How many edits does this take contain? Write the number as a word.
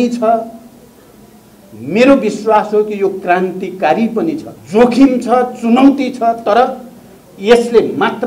one